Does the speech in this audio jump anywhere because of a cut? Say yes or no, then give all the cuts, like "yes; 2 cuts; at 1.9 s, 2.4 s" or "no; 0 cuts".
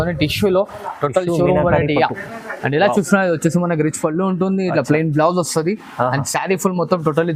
no; 0 cuts